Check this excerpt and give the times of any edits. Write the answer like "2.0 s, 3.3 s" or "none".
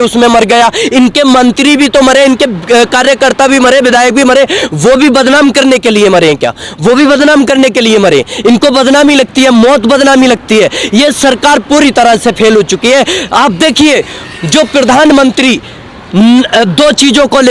none